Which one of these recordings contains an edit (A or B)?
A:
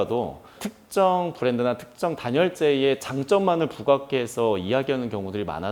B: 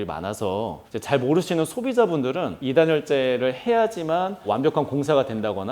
B